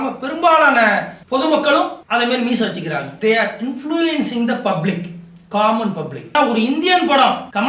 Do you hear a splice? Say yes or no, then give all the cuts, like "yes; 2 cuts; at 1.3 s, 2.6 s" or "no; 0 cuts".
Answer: yes; 2 cuts; at 3.1 s, 6.3 s